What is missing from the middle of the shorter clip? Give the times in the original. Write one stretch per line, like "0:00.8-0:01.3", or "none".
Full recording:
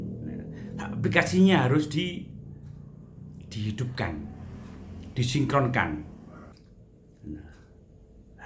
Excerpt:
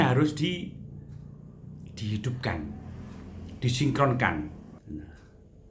0:06.3-0:07.1